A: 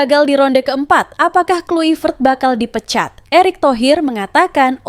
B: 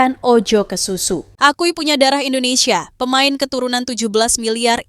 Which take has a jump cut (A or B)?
B